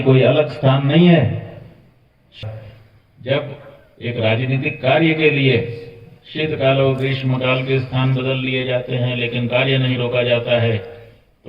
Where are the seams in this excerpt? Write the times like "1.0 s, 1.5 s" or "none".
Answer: 2.4 s

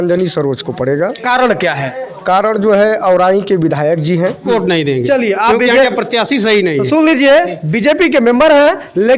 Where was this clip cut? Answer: 4.4 s

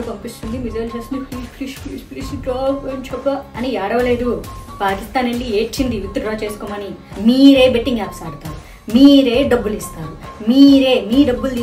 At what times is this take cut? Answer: 7.0 s

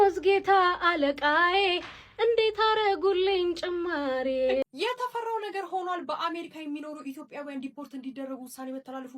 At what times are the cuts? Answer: 4.8 s

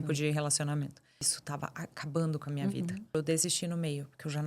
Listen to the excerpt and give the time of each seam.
1.4 s, 3.1 s

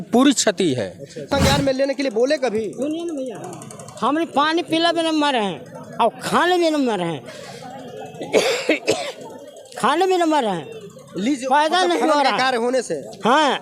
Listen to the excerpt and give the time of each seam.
1.2 s

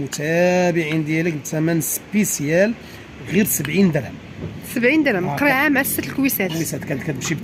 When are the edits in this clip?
none

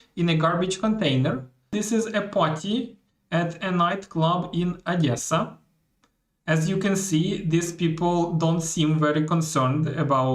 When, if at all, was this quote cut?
1.7 s

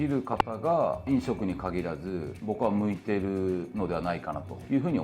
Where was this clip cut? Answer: none

